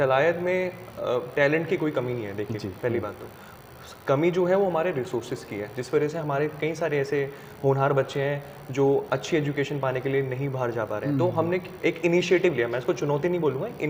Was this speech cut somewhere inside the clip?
no; 0 cuts

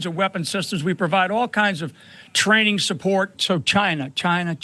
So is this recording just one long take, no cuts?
no; 1 cut; at 3.4 s

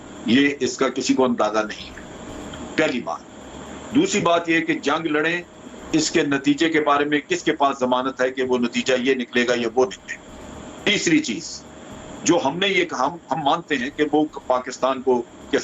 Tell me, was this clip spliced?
no; 0 cuts

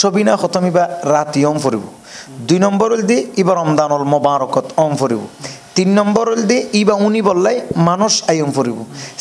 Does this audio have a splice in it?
no; 0 cuts

